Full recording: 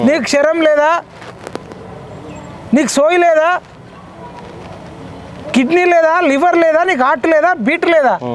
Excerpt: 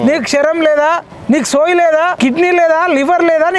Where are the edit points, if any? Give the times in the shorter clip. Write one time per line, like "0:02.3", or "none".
0:01.1
0:02.2